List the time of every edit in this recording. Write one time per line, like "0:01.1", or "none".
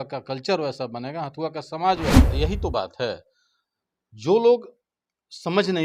0:02.3